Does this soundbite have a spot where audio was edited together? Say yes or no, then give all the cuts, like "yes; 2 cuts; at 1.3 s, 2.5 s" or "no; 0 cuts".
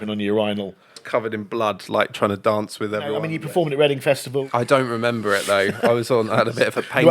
yes; 3 cuts; at 1.0 s, 3.2 s, 4.5 s